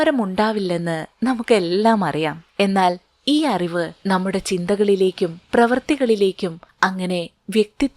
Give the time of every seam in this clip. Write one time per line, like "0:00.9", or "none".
0:02.4
0:03.9
0:06.6